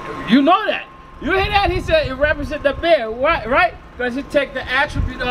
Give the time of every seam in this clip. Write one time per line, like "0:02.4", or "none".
none

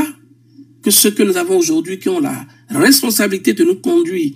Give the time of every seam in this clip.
none

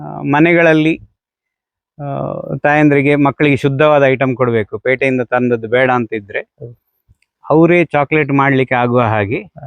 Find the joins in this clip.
none

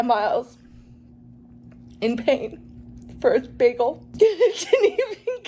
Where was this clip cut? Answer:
0:04.0

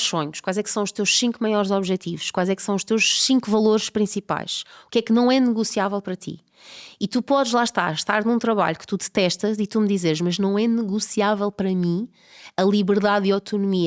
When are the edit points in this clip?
none

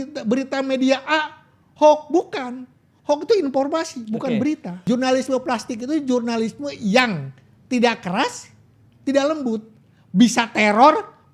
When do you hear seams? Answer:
0:04.7

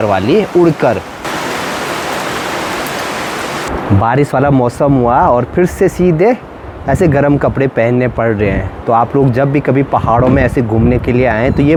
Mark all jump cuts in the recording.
none

